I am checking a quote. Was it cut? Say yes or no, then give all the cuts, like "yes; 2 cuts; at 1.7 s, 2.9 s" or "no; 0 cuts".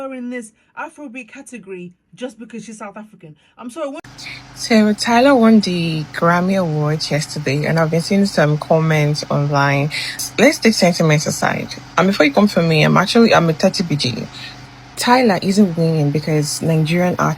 yes; 1 cut; at 4.0 s